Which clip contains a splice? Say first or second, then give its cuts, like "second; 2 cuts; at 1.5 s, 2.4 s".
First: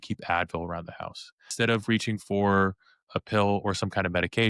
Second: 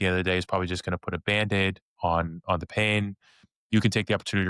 first; 2 cuts; at 1.5 s, 3.1 s